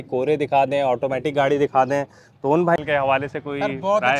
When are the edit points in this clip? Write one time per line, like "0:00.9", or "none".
0:02.8